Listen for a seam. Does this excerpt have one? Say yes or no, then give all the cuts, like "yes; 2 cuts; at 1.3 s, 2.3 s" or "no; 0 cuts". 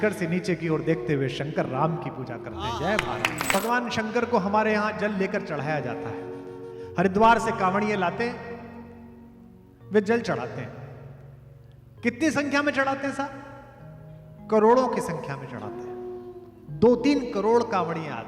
yes; 1 cut; at 3.5 s